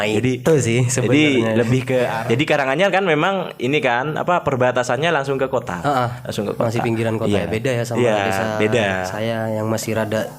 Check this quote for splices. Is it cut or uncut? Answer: cut